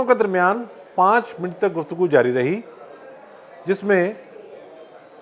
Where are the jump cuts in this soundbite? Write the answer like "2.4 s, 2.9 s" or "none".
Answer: none